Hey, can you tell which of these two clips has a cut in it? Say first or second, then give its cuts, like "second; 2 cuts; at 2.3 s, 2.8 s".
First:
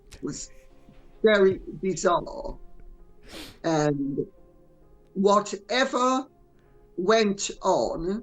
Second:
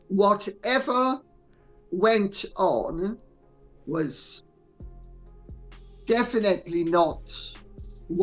second; 2 cuts; at 4.6 s, 6.0 s